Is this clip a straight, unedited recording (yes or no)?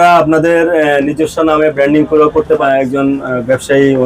no